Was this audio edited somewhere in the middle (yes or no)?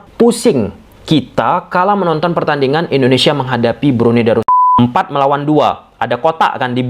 yes